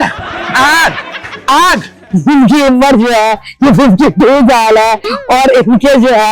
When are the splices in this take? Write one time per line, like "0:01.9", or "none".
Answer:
0:02.0